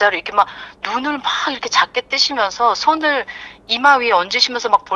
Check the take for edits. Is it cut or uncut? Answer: uncut